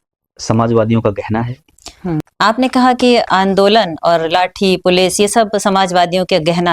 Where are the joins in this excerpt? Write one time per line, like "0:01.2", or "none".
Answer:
0:02.3